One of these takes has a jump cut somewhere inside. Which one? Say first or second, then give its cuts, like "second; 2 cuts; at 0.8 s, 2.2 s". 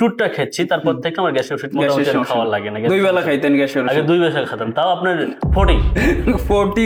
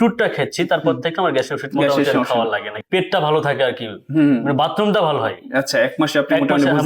second; 1 cut; at 2.6 s